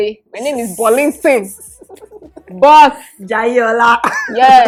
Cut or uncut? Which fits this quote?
uncut